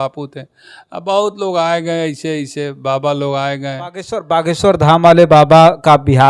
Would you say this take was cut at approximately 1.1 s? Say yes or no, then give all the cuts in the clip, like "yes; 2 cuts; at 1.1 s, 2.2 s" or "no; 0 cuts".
no; 1 cut; at 4.2 s